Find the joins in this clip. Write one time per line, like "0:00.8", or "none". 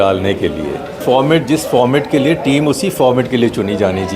0:01.0